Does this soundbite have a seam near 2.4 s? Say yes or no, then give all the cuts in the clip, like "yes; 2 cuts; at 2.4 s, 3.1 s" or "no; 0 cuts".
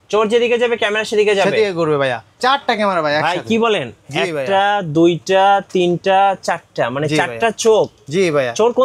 yes; 1 cut; at 2.4 s